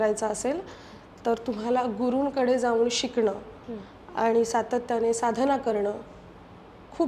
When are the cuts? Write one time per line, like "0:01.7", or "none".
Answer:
none